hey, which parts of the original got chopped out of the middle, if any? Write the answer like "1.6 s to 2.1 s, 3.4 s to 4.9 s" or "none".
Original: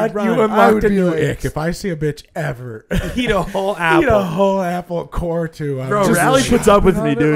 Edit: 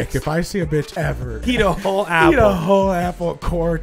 2.7 s to 3.1 s